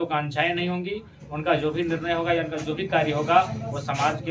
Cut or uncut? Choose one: uncut